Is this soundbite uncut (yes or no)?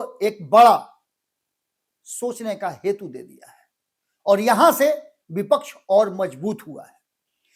yes